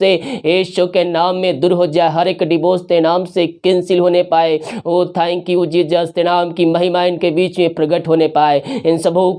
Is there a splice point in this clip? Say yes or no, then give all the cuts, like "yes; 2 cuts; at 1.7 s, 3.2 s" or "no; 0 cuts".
no; 0 cuts